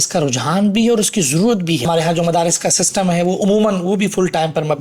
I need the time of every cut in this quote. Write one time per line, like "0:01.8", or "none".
0:01.8